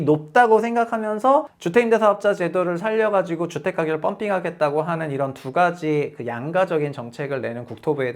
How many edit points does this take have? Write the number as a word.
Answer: one